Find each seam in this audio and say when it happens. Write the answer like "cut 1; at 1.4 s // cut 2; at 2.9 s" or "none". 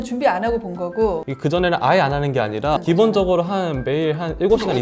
cut 1; at 1.3 s // cut 2; at 2.8 s